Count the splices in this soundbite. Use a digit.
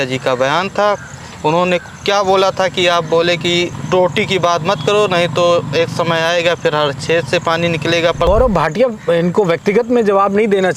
2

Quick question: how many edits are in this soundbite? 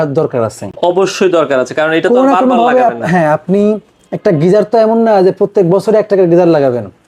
0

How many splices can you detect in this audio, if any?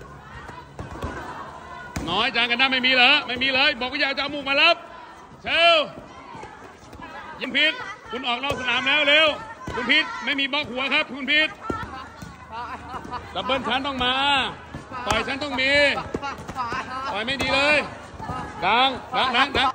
2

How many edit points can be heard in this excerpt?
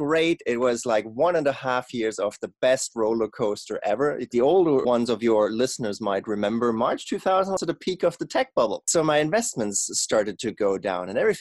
2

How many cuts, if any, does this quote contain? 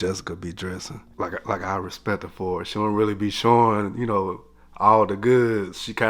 0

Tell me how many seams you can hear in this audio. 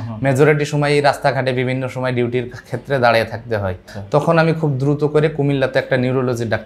1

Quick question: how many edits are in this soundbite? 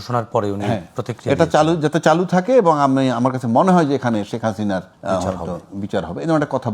1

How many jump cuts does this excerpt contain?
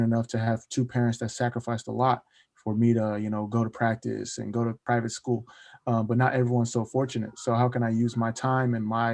1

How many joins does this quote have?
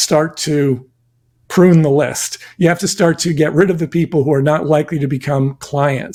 0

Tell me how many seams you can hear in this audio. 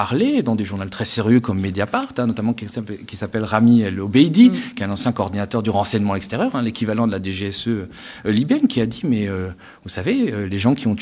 0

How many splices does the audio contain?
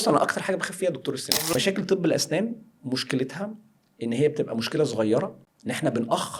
2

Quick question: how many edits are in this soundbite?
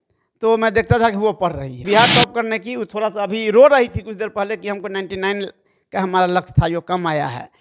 1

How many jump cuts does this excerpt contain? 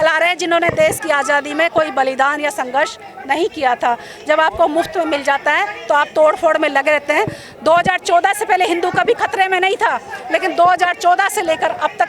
0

